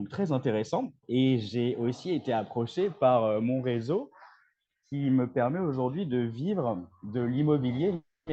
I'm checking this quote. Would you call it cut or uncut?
cut